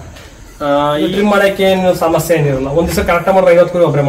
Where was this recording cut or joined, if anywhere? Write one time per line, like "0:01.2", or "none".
0:01.1